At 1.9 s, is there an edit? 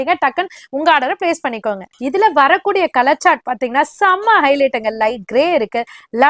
yes; 1 cut; at 1.9 s

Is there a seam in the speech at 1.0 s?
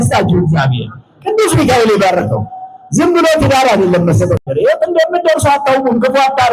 no; 1 cut; at 4.4 s

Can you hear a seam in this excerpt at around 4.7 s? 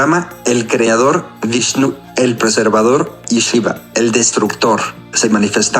no; 2 cuts; at 1.3 s, 3.2 s

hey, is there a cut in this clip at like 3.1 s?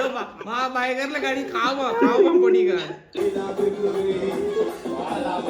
yes; 1 cut; at 3.1 s

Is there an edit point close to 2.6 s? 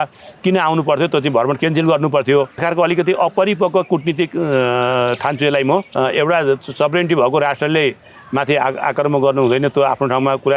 yes; 2 cuts; at 2.6 s, 5.9 s

